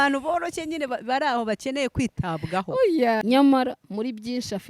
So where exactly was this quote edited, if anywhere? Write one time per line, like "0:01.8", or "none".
0:03.2